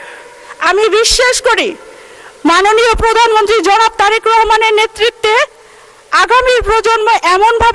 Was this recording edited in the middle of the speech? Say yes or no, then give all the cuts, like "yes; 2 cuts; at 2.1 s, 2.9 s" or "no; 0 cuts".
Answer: no; 0 cuts